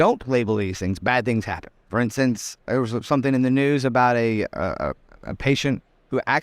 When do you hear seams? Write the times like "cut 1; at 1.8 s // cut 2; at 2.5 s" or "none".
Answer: cut 1; at 1.7 s // cut 2; at 2.6 s